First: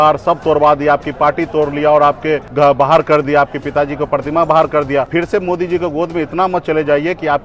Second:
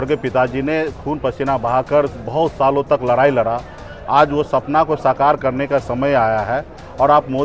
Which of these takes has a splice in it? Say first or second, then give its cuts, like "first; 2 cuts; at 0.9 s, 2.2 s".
first; 2 cuts; at 2.5 s, 5.1 s